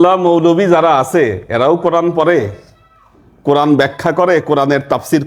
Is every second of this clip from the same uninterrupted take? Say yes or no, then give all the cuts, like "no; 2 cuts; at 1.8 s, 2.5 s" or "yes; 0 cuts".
yes; 0 cuts